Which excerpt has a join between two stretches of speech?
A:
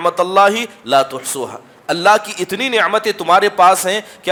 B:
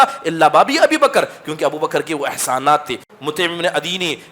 B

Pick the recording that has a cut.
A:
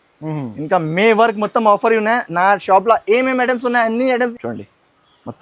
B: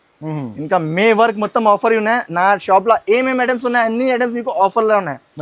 A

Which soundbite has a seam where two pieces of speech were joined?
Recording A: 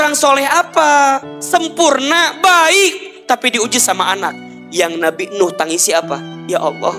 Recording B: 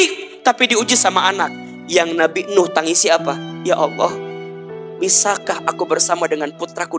A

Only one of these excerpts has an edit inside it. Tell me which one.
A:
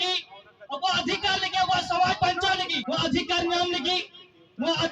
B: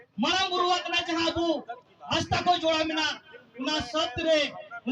A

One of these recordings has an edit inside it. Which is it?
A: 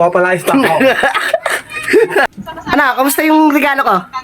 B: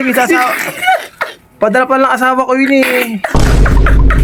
A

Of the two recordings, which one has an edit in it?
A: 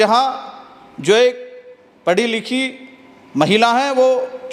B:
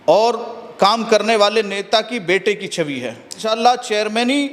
B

